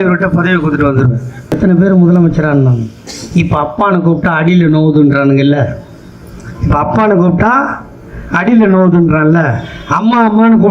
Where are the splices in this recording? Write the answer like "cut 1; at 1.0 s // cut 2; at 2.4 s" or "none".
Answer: cut 1; at 1.4 s